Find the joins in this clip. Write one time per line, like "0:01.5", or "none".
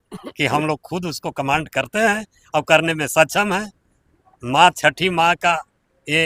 none

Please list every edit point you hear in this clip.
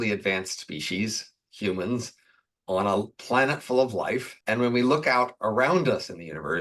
none

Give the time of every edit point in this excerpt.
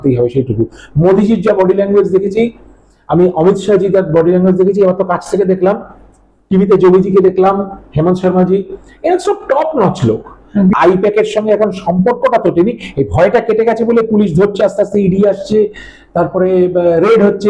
none

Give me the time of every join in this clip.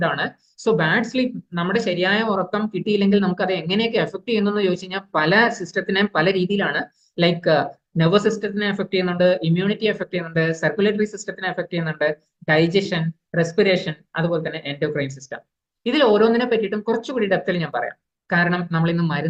none

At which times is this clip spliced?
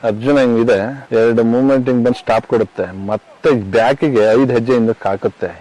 none

